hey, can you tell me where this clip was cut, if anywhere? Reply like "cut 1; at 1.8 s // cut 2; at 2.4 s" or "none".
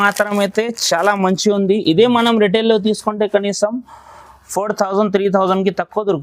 none